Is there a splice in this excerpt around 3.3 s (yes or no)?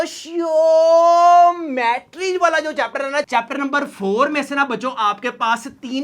yes